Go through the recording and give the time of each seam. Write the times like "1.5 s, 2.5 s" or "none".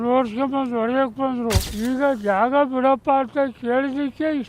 1.7 s